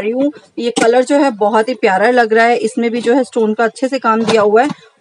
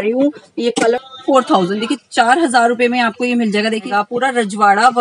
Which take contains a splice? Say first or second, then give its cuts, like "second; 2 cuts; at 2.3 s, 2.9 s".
second; 2 cuts; at 0.9 s, 3.9 s